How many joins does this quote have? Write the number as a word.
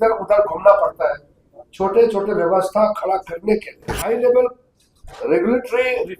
one